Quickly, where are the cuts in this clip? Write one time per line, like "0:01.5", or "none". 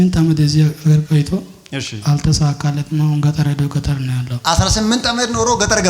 none